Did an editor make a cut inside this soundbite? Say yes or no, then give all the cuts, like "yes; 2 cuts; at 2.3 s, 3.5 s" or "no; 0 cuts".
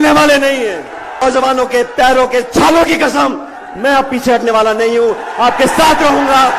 yes; 1 cut; at 1.2 s